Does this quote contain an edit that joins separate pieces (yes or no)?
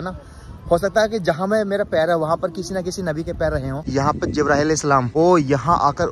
yes